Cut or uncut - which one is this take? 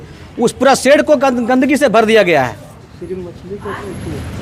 uncut